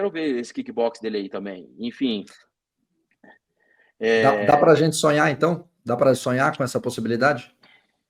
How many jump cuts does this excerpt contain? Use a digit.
0